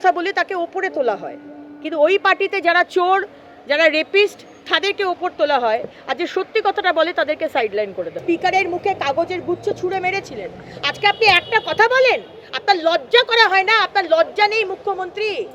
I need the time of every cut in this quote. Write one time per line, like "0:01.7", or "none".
0:08.2